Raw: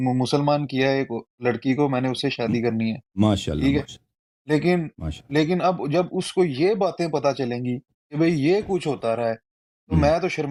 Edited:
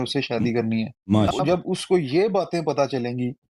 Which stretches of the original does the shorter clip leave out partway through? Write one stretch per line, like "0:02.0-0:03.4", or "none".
0:03.4-0:05.8